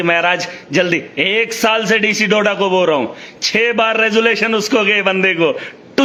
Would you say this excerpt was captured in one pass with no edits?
yes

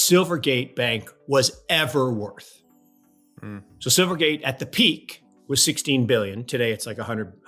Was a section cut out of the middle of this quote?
no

